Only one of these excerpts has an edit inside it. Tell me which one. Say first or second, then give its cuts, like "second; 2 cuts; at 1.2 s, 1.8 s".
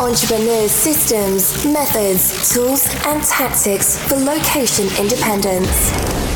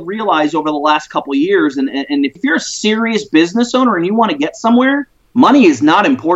second; 2 cuts; at 2.3 s, 5.2 s